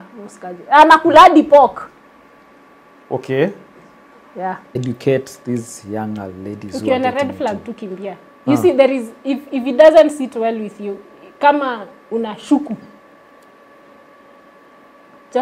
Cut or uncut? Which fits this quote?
cut